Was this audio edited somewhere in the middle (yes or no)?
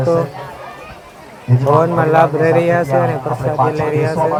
no